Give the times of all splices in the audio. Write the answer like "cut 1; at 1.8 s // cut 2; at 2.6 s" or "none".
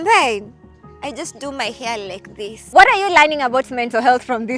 cut 1; at 2.6 s